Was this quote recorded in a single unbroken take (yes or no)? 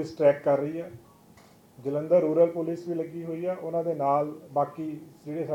yes